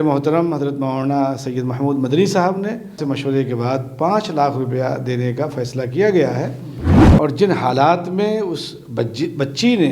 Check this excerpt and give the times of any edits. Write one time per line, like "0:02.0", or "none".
0:03.0
0:07.0